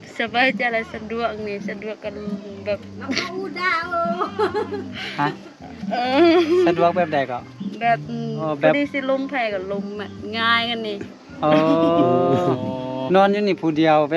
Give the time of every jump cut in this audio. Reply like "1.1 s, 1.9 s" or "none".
8.4 s